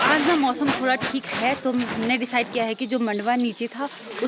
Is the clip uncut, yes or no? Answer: yes